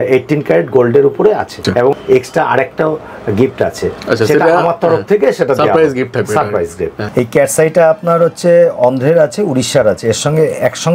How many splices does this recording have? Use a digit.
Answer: 2